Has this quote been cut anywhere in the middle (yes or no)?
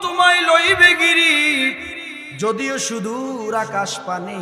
no